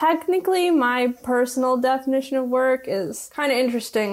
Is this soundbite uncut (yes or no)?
yes